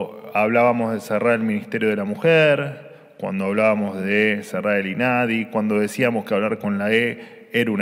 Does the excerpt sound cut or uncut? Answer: uncut